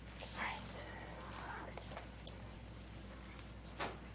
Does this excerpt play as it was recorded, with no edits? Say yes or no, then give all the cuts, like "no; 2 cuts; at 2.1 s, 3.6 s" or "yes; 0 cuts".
no; 1 cut; at 2.6 s